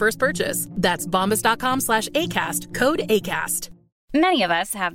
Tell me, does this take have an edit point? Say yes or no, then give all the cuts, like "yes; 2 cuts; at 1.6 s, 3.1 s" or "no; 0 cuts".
no; 0 cuts